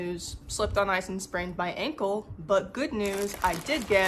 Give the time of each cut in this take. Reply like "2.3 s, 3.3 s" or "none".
none